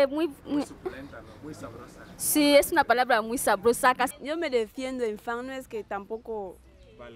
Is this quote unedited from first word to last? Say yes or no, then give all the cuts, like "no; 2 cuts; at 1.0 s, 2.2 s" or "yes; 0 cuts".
no; 1 cut; at 4.2 s